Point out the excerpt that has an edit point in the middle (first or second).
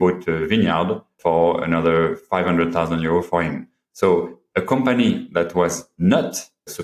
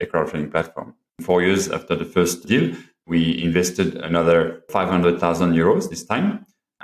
second